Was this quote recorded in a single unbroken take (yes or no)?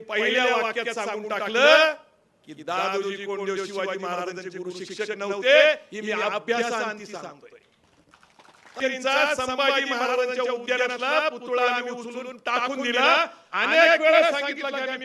no